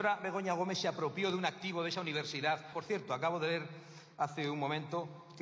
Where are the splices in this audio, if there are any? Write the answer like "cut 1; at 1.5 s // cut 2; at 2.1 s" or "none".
cut 1; at 2.7 s